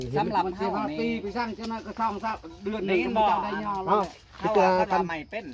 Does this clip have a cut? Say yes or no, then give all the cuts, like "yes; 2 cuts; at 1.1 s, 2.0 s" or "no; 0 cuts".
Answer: no; 0 cuts